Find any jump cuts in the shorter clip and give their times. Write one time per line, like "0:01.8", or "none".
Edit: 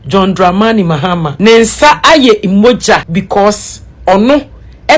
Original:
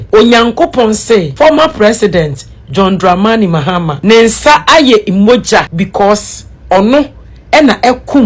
none